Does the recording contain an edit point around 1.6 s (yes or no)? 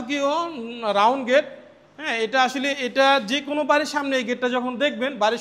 no